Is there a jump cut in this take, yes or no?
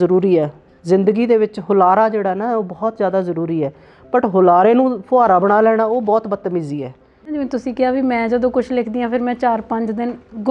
yes